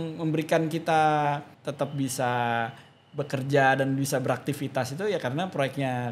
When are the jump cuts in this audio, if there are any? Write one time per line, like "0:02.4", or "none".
0:01.6